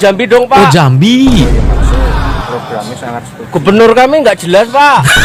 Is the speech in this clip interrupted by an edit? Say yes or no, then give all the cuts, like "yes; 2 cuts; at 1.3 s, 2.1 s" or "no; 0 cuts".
no; 0 cuts